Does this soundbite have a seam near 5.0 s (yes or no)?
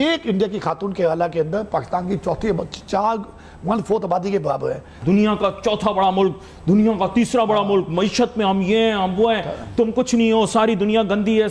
yes